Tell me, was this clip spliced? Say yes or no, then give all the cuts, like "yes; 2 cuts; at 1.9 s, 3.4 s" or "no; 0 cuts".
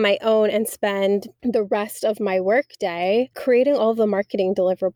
yes; 2 cuts; at 1.3 s, 3.4 s